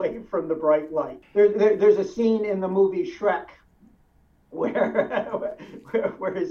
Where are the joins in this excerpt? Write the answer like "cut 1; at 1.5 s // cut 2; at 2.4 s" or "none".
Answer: cut 1; at 1.2 s